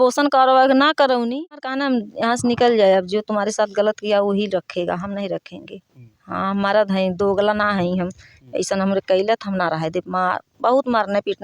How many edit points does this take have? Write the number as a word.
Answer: one